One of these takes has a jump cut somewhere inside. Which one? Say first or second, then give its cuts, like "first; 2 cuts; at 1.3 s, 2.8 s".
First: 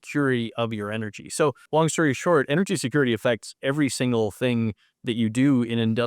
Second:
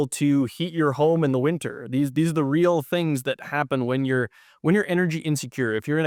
first; 1 cut; at 1.6 s